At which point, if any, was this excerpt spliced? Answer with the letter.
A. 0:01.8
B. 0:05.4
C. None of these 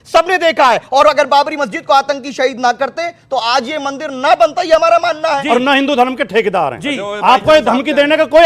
B